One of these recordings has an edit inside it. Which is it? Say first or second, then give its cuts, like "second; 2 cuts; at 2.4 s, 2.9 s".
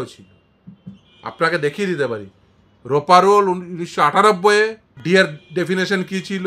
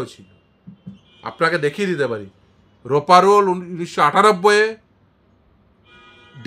first; 1 cut; at 4.9 s